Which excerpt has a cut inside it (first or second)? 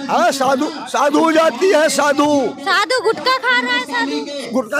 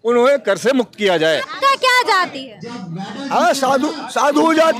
second